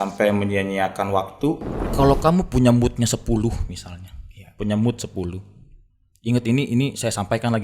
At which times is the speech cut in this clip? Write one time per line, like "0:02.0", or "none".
0:01.8